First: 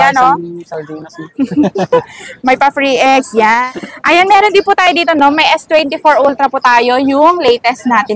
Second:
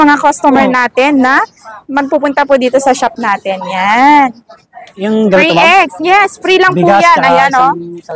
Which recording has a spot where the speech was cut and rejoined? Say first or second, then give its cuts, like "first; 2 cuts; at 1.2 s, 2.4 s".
first; 1 cut; at 3.6 s